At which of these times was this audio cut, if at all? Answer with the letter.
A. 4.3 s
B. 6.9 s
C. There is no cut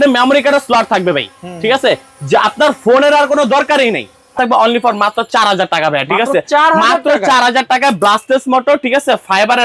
A